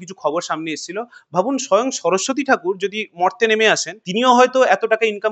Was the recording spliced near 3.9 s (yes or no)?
yes